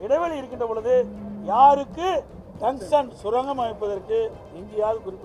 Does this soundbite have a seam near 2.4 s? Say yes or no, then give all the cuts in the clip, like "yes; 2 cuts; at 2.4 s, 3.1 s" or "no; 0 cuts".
yes; 1 cut; at 2.4 s